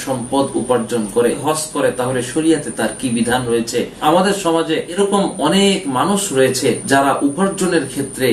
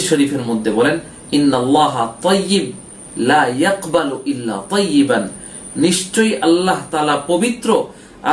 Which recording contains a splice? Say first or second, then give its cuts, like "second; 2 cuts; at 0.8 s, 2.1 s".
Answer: first; 3 cuts; at 1.4 s, 4.0 s, 6.8 s